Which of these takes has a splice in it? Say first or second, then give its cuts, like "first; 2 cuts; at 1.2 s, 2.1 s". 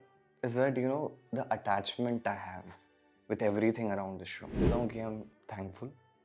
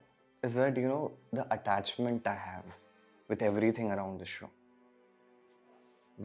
first; 1 cut; at 4.6 s